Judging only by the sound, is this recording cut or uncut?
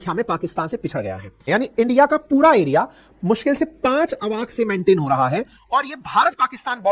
cut